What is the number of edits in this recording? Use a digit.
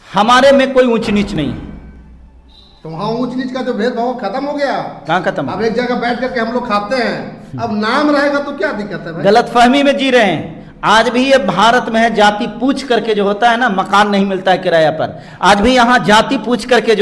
0